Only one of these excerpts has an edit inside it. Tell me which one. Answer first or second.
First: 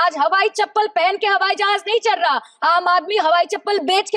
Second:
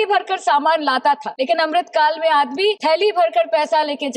second